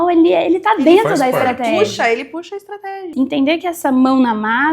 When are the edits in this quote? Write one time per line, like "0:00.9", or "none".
0:03.0